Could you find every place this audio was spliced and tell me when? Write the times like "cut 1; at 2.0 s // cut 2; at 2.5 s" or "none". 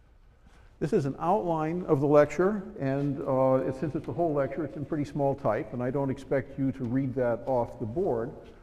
cut 1; at 7.1 s

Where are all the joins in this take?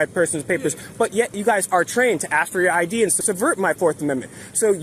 cut 1; at 1.4 s // cut 2; at 3.2 s

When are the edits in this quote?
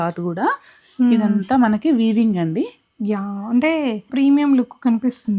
cut 1; at 4.1 s

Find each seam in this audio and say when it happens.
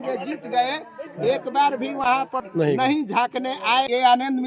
cut 1; at 2.4 s // cut 2; at 3.5 s

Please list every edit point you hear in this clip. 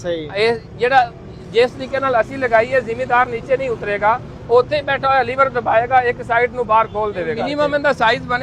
cut 1; at 7.4 s

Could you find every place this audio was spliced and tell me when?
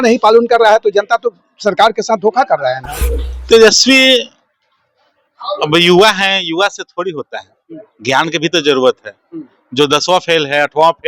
cut 1; at 3.3 s

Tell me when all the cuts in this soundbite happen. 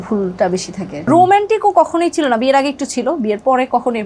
cut 1; at 1.1 s

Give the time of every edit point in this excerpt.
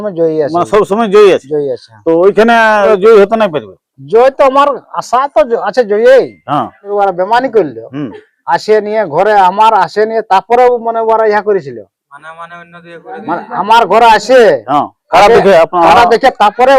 cut 1; at 2.9 s // cut 2; at 6.9 s

